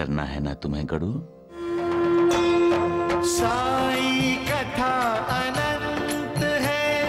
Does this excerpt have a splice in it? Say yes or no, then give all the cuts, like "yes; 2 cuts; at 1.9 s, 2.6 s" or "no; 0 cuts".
yes; 1 cut; at 1.8 s